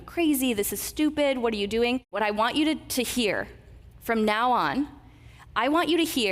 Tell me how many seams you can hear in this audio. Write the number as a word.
one